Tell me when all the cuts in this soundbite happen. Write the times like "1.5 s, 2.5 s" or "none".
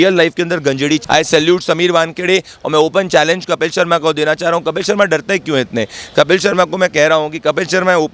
1.0 s